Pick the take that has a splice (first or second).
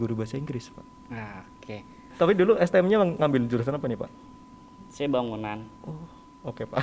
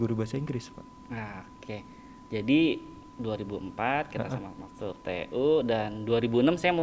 first